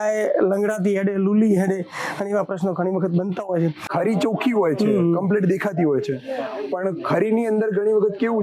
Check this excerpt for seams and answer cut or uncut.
cut